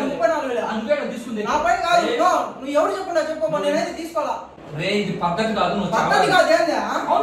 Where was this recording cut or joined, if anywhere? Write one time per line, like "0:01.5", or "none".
0:04.6